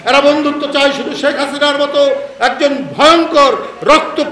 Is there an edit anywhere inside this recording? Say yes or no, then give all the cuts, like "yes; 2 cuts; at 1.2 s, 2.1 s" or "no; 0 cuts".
no; 0 cuts